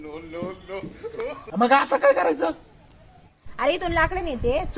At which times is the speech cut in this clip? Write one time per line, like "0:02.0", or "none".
none